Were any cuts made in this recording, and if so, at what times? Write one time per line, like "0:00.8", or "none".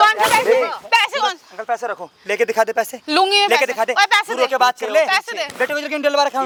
none